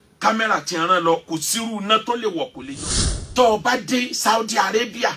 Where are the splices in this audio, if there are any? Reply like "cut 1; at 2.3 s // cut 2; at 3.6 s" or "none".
cut 1; at 2.6 s